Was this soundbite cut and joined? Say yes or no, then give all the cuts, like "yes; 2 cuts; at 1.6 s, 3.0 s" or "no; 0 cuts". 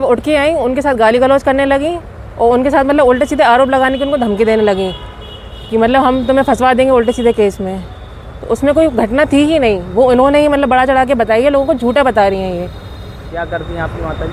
no; 0 cuts